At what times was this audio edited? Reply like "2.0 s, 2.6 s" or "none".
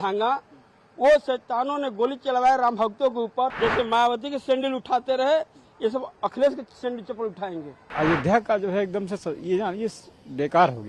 3.5 s, 7.9 s

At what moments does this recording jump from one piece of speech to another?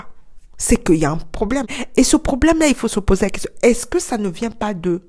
1.8 s

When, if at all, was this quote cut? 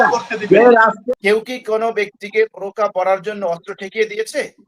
1.0 s

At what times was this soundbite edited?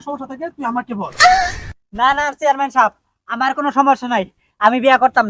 none

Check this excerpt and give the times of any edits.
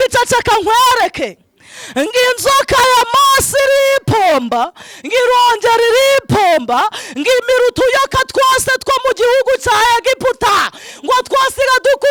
none

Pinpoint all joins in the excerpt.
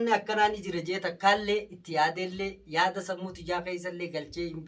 none

